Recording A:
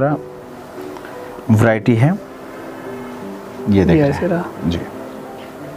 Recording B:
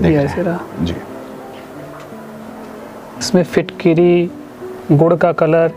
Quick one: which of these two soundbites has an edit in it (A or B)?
B